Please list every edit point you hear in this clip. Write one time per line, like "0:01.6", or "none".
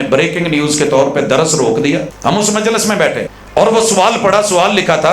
0:02.1
0:03.4